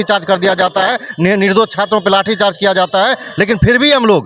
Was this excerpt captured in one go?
yes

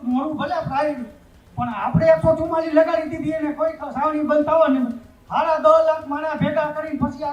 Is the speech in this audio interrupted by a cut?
no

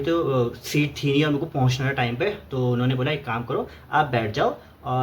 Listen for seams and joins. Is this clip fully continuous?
yes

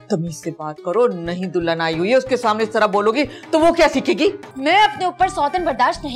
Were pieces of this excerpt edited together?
yes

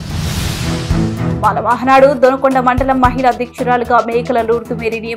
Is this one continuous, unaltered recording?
yes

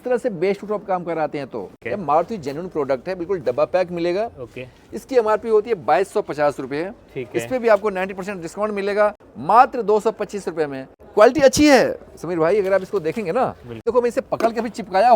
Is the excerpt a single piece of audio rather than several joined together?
no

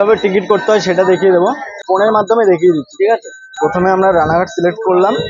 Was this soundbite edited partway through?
no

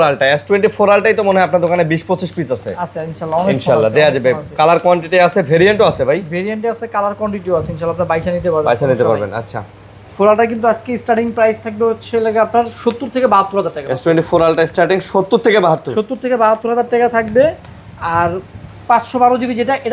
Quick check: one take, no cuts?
yes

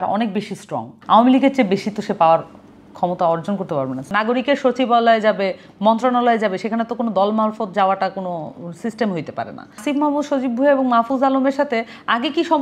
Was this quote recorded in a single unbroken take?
no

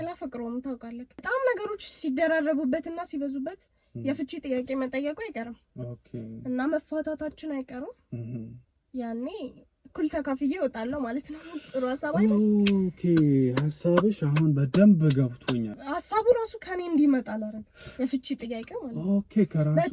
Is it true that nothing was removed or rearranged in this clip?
no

